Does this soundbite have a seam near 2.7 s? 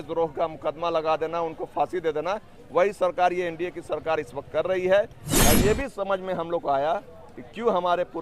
no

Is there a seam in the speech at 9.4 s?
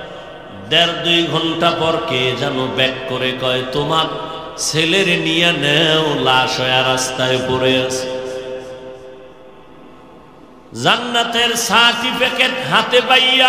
yes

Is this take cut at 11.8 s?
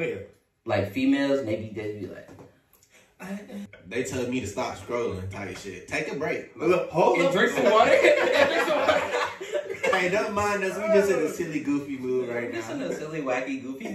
no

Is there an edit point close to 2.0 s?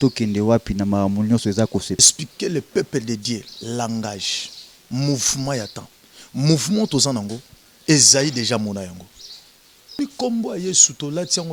yes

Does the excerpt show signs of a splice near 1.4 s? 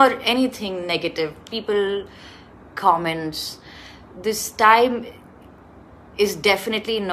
no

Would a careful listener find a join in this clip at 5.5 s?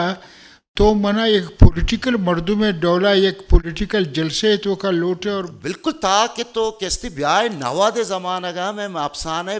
yes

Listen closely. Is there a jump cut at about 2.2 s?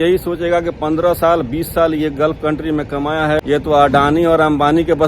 no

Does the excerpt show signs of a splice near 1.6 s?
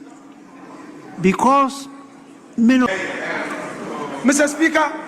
no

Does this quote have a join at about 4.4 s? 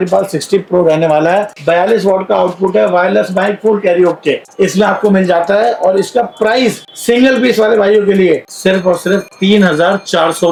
no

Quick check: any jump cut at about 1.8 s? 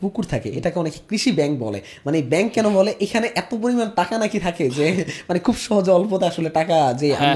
no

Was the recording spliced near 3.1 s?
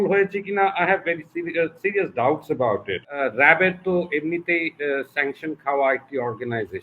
yes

